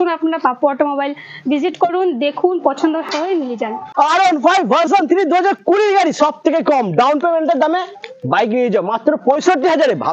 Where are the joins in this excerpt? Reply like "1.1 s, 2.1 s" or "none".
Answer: 3.8 s